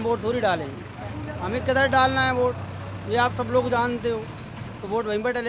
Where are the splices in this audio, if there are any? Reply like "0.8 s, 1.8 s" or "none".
none